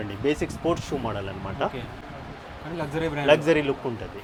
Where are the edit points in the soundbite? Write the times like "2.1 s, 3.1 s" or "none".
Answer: none

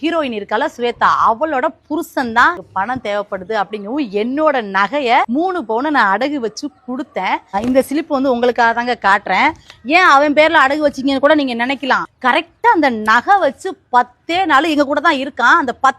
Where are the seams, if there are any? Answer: 2.6 s, 12.1 s

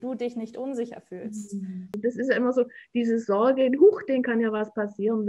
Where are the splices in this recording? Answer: 1.9 s

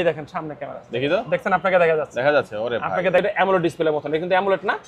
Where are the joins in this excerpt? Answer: 3.2 s

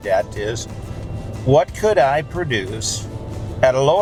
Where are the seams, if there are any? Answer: none

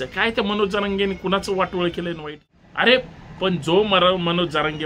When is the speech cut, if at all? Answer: 2.3 s

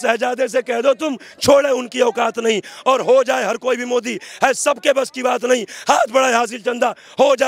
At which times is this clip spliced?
none

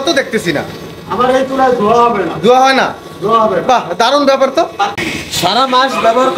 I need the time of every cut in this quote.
5.0 s

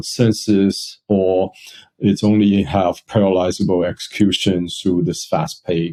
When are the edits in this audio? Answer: none

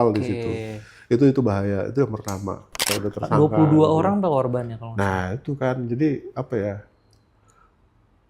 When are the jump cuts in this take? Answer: 2.9 s

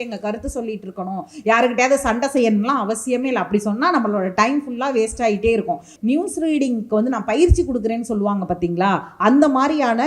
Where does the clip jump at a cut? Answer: 5.9 s

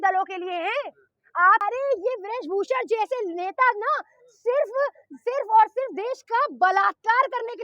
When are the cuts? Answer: 1.6 s

